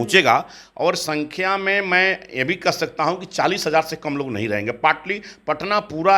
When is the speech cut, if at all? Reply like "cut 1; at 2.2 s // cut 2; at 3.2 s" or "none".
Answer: none

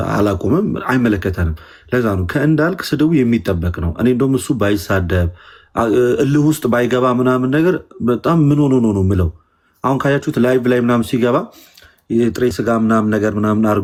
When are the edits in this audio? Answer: none

